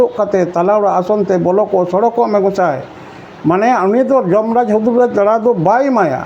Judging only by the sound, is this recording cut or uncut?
uncut